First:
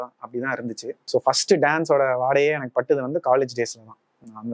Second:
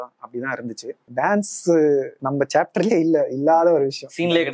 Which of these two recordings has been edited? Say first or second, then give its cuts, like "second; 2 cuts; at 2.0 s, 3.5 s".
second; 1 cut; at 1.0 s